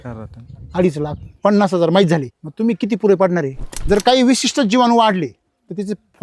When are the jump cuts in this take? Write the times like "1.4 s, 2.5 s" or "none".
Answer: 2.4 s, 3.7 s

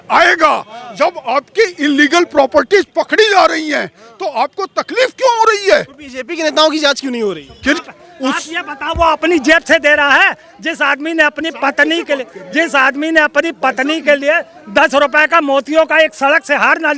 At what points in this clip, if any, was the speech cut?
7.8 s

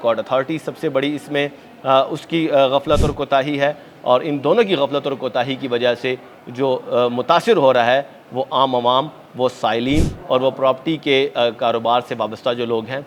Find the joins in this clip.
none

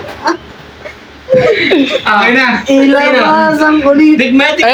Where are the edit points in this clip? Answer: none

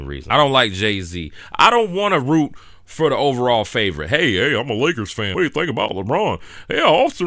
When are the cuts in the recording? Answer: 5.3 s

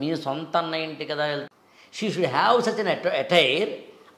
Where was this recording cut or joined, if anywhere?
1.5 s

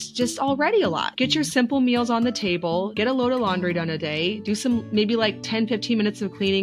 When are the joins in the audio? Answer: 1.1 s, 2.9 s

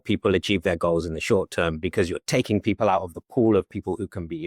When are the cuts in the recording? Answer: none

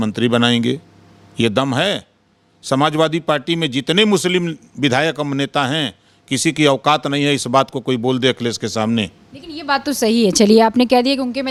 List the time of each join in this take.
none

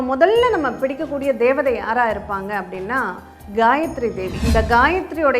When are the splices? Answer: 4.4 s

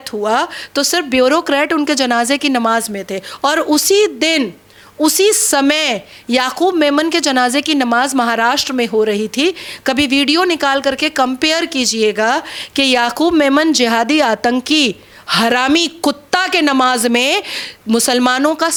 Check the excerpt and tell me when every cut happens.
none

